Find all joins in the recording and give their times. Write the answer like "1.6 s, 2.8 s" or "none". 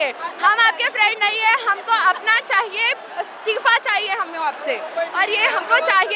none